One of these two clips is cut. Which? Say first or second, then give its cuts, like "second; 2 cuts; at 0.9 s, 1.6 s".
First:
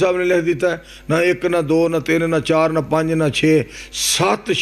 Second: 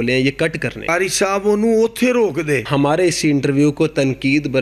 second; 2 cuts; at 0.9 s, 2.7 s